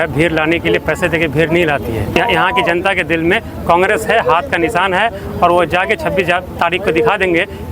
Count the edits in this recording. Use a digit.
1